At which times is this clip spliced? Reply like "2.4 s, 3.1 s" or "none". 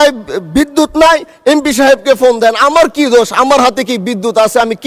none

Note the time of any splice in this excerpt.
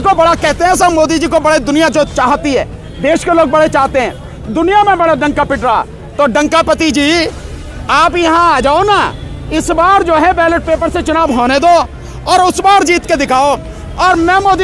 none

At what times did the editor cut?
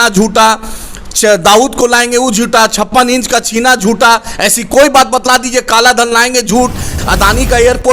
6.9 s

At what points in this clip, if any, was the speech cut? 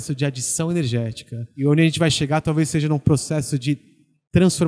1.5 s

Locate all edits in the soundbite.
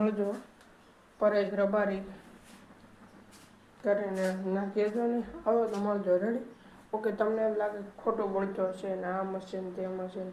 none

